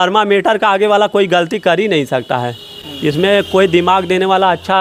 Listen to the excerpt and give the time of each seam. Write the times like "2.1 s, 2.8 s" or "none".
none